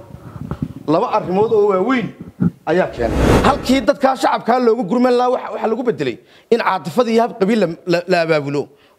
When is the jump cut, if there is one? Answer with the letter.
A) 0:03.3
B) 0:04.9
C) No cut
A